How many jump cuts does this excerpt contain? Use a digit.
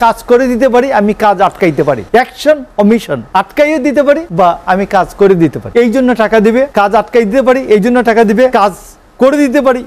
6